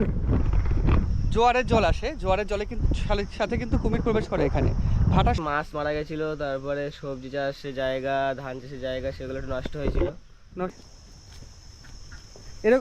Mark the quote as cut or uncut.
cut